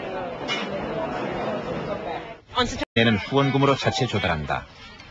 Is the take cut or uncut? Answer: uncut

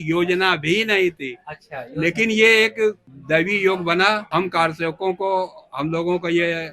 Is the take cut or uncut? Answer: cut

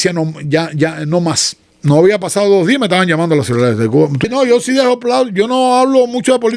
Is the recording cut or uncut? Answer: cut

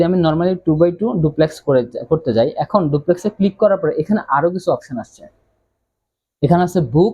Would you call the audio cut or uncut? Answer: uncut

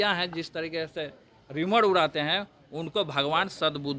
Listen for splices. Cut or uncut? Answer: uncut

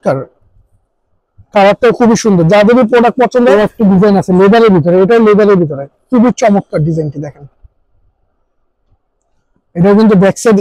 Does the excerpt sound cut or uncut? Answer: cut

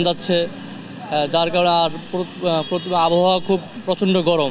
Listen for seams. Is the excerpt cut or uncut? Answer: uncut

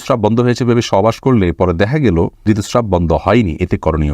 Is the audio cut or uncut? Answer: cut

